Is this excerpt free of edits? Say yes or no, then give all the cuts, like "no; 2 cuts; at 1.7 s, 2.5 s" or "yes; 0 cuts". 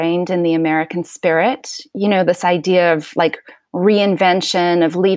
yes; 0 cuts